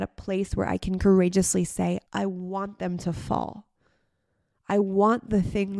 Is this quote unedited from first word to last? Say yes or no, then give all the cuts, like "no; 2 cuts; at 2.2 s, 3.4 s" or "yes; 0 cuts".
no; 1 cut; at 2.1 s